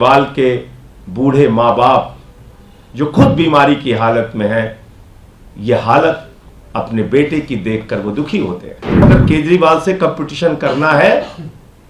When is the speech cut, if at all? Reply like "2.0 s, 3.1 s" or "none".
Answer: 9.0 s